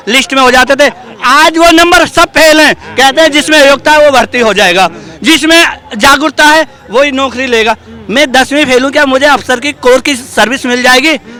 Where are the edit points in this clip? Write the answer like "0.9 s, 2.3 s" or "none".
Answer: none